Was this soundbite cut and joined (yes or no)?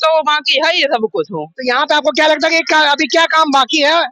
no